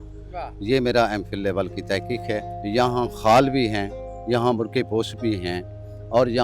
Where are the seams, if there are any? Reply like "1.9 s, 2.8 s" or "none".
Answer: 2.5 s

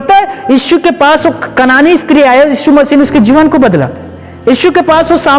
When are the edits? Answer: none

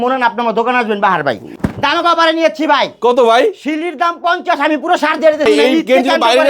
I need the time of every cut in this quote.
1.5 s, 5.5 s

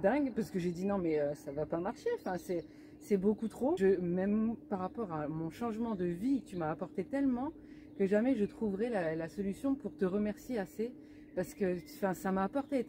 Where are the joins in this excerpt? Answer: 3.8 s

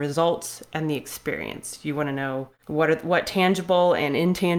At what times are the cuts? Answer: 2.6 s

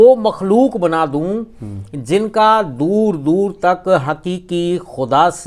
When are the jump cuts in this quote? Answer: none

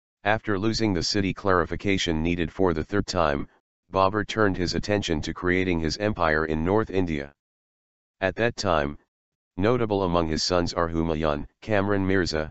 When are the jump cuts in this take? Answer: none

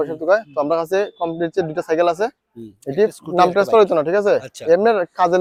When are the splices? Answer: none

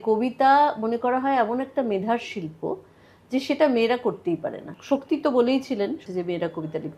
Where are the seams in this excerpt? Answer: 4.7 s, 6.0 s

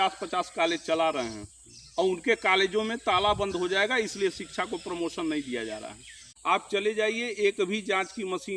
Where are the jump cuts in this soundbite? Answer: 6.2 s

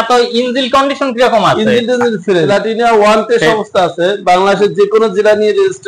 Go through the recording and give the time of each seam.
2.5 s

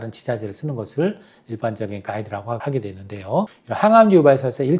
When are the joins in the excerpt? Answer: 2.6 s, 3.6 s

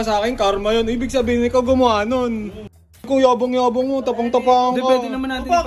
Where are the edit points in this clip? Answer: 3.0 s

